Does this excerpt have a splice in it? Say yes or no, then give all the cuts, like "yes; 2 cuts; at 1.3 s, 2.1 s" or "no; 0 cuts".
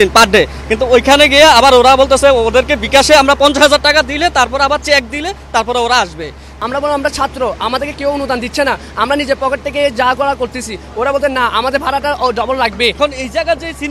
yes; 2 cuts; at 6.4 s, 13.0 s